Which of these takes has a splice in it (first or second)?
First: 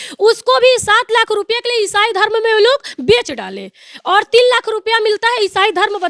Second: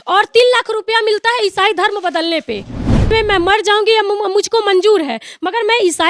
second